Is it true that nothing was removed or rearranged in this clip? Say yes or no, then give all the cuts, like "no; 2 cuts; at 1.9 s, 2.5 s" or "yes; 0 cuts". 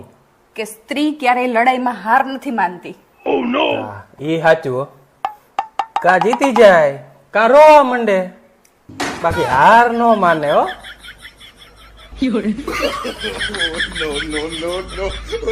yes; 0 cuts